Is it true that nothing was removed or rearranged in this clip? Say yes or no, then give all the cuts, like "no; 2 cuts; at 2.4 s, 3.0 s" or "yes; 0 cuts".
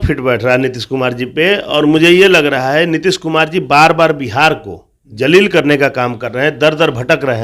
yes; 0 cuts